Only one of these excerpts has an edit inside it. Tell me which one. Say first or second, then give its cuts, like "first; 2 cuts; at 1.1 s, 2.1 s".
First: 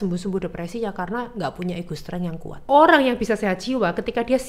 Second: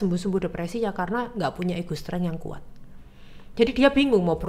first; 1 cut; at 2.7 s